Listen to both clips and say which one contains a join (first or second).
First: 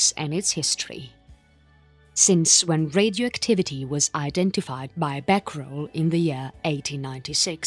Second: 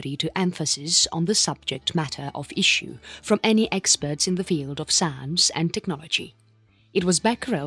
first